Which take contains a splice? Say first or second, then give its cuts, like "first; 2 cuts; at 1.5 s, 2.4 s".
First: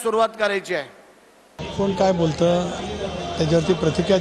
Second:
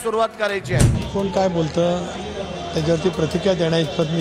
second; 1 cut; at 1.0 s